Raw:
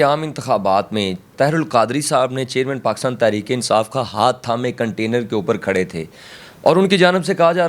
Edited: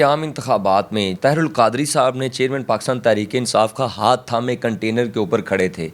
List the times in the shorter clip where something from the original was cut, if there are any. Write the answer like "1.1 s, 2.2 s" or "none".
1.1 s